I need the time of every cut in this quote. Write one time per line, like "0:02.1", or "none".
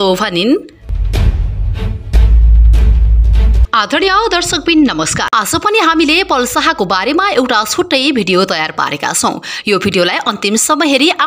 0:05.2